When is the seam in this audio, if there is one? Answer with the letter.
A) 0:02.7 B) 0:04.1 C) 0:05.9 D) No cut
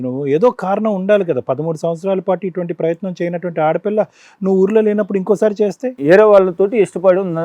C